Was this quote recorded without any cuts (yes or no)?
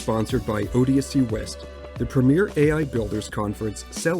no